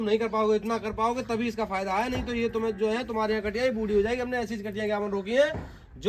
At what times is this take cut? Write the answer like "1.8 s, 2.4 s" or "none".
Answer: none